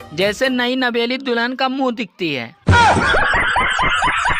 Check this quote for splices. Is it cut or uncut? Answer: cut